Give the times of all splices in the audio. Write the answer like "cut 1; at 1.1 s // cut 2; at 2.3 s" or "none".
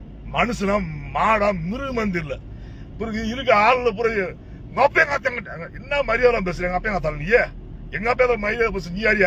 none